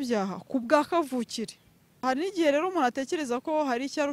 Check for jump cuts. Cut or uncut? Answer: cut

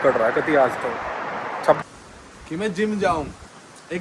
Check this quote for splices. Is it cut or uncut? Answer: cut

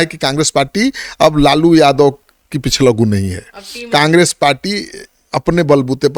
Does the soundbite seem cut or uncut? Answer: uncut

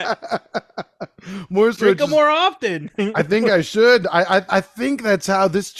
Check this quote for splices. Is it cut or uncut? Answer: cut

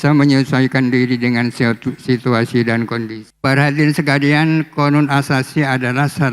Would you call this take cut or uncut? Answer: cut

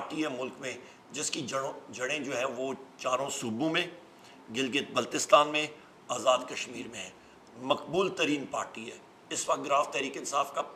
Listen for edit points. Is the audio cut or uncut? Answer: uncut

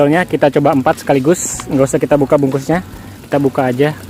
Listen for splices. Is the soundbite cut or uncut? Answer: uncut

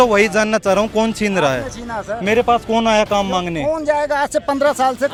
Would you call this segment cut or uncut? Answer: uncut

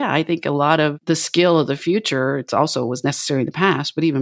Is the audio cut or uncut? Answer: cut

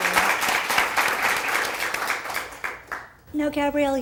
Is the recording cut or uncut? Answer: uncut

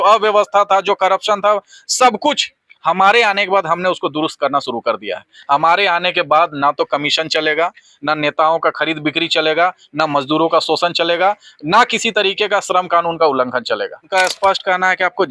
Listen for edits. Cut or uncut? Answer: cut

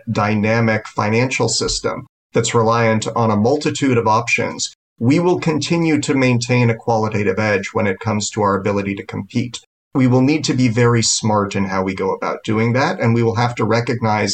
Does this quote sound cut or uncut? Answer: uncut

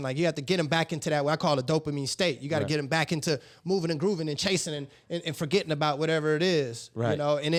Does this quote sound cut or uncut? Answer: uncut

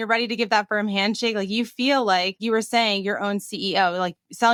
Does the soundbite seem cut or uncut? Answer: uncut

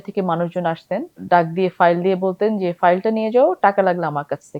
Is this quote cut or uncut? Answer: cut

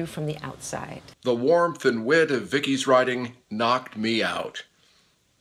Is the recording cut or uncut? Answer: cut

